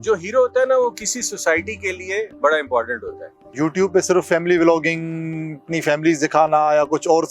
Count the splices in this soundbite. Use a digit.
1